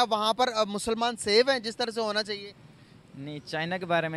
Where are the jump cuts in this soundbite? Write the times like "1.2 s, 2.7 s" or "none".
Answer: none